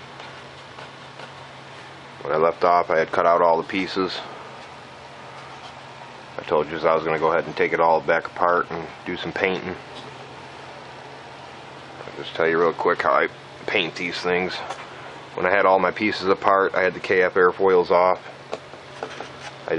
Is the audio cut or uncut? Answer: uncut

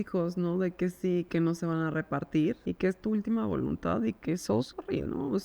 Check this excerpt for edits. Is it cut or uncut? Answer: cut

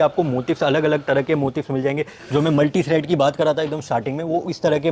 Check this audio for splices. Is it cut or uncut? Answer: cut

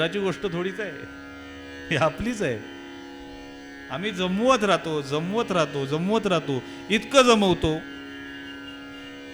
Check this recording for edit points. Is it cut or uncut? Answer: uncut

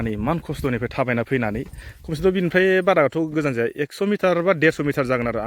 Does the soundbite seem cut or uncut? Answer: uncut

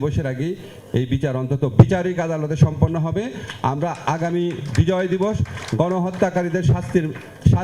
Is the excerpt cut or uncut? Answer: uncut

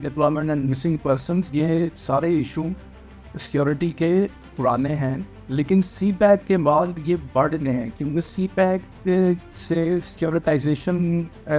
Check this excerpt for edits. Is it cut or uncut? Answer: uncut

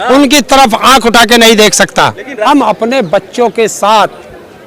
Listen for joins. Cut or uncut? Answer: cut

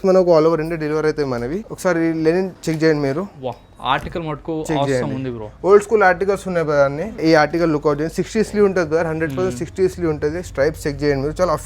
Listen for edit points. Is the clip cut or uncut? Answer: cut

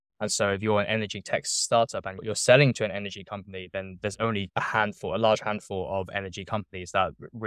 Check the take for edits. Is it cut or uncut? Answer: uncut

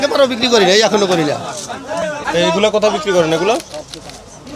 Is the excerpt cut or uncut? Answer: cut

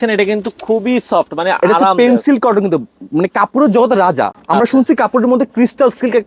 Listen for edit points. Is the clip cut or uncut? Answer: uncut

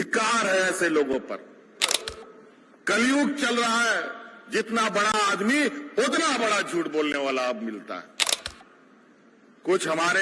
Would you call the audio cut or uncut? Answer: cut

